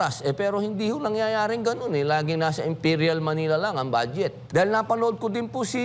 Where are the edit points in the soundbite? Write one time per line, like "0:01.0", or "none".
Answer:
0:04.4

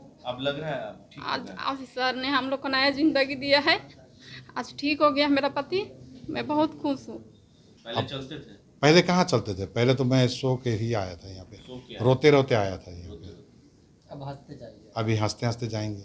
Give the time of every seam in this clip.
0:07.7

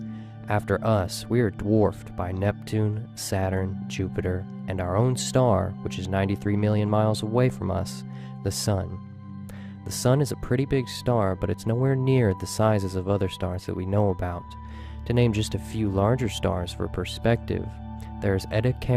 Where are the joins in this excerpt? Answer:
0:14.2

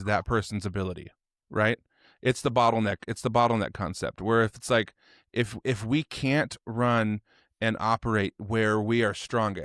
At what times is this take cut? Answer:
none

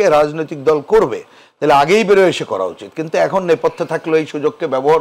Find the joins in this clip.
none

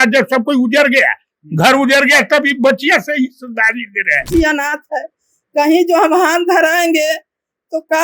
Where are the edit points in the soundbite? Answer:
0:04.3

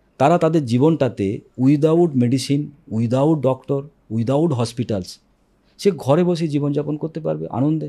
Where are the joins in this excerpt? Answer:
none

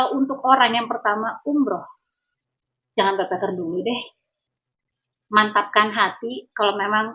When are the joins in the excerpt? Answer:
none

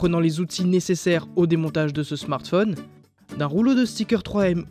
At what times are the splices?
none

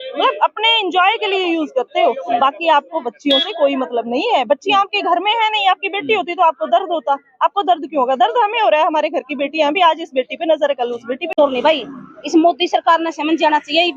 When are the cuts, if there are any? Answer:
0:11.3

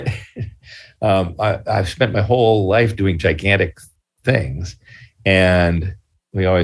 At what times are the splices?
none

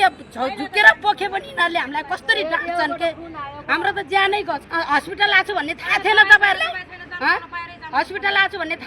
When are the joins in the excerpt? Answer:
0:04.6

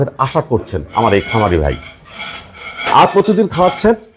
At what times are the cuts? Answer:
none

